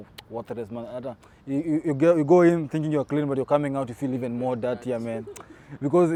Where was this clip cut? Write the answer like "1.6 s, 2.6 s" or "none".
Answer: none